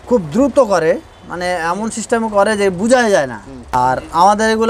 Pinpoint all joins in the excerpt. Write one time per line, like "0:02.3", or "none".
0:03.7

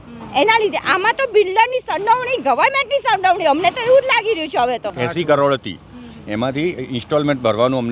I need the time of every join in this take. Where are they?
0:04.9

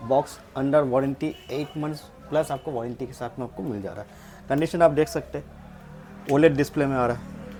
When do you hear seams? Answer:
none

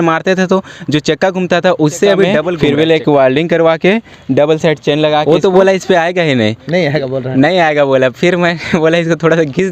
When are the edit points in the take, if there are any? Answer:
0:02.5
0:05.2

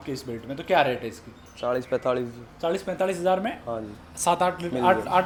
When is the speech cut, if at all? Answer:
none

